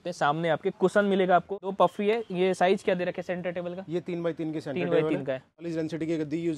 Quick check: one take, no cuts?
no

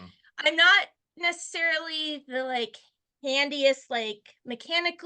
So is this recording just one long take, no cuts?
yes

